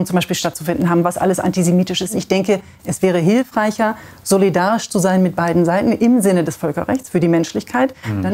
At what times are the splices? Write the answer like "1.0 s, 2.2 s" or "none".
2.2 s